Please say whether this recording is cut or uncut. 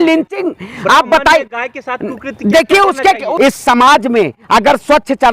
uncut